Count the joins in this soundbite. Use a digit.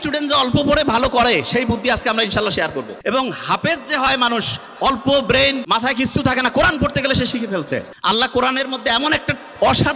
3